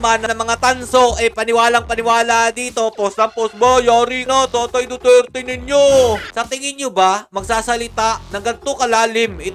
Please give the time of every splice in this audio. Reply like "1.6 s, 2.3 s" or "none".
6.4 s